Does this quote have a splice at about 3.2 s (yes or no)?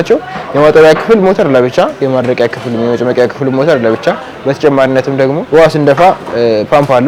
no